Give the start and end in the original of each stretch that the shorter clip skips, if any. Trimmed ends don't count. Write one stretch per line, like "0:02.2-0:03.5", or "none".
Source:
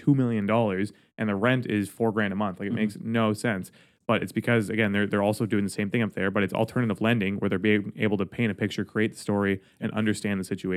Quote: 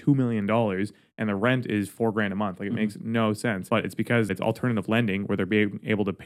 0:04.0-0:06.1